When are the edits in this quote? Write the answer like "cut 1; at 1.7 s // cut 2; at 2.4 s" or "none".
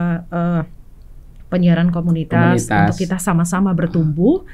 none